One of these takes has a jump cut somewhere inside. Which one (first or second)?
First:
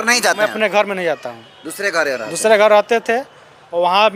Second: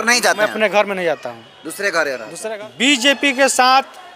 second